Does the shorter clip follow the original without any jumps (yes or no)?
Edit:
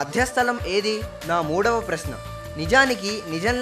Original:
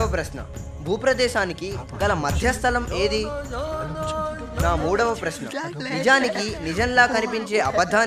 no